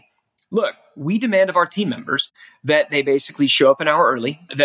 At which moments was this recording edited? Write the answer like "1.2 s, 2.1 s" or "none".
none

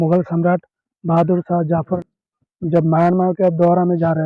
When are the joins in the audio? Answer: none

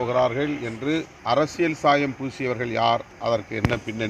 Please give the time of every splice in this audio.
1.1 s, 3.1 s

